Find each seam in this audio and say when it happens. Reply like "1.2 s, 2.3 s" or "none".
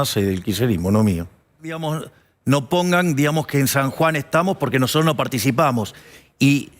1.8 s